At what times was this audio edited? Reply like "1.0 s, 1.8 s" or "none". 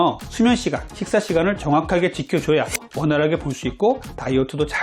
2.8 s